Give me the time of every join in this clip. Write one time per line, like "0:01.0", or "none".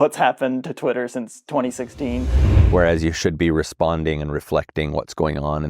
0:02.5